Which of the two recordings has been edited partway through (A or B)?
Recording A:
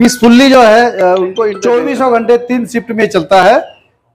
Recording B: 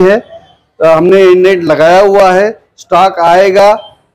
A